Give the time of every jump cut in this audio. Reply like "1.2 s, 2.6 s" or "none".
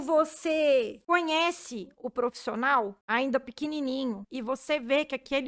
1.0 s, 3.0 s, 4.3 s